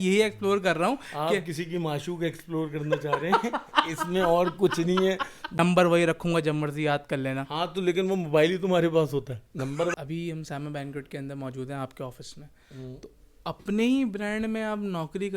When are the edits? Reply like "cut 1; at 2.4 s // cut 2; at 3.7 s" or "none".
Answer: cut 1; at 5.6 s // cut 2; at 9.9 s